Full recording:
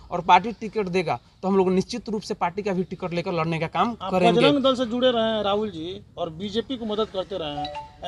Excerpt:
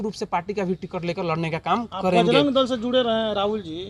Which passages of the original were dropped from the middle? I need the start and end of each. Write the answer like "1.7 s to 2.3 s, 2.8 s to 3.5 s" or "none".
none